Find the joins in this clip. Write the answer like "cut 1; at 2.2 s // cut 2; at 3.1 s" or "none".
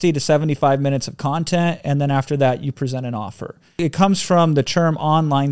cut 1; at 3.8 s